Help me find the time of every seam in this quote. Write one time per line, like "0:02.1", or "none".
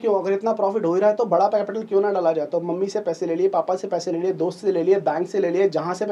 none

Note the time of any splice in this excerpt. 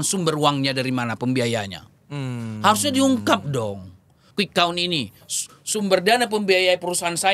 0:04.2

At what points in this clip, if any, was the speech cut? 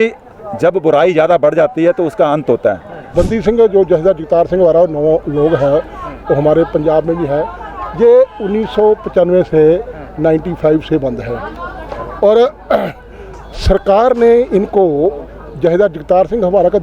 0:03.1

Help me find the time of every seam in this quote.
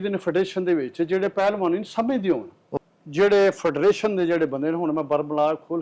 0:02.7

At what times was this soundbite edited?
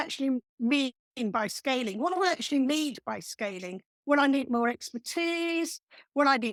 none

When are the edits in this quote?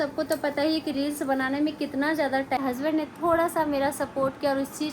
0:02.6

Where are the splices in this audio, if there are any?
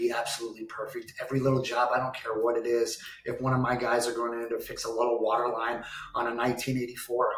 none

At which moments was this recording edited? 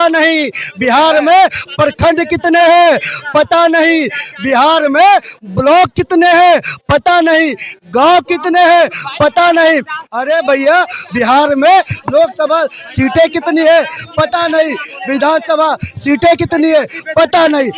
none

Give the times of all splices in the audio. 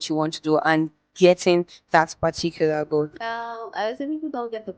0:03.2

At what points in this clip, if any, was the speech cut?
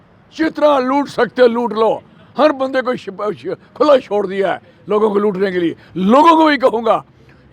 none

